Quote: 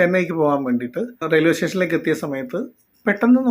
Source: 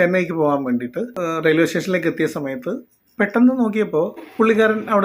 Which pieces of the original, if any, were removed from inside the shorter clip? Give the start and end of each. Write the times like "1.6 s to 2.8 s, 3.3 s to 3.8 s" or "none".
1.2 s to 1.3 s